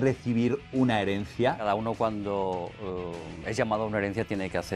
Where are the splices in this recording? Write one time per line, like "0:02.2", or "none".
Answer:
0:01.6